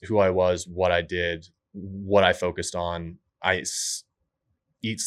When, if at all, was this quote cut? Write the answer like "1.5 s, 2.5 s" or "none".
none

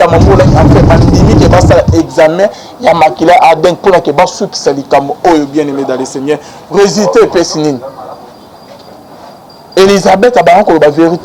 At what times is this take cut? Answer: none

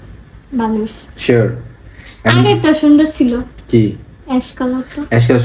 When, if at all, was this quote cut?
none

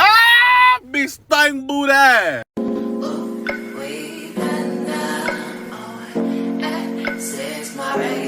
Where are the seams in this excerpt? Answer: 2.4 s

